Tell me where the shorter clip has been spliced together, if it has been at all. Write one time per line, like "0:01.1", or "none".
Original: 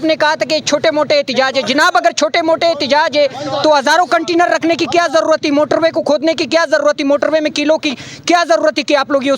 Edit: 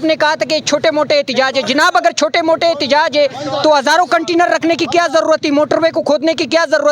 none